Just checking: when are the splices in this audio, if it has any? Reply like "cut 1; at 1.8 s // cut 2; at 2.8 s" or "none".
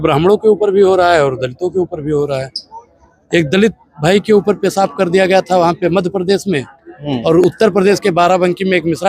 none